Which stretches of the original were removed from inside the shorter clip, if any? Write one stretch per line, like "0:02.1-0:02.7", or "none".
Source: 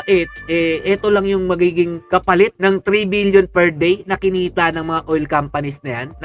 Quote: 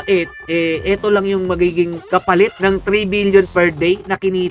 none